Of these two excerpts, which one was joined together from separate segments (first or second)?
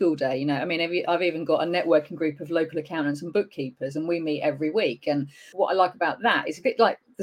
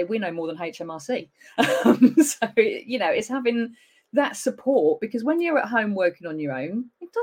first